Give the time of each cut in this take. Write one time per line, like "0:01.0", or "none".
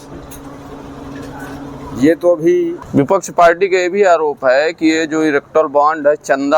0:02.8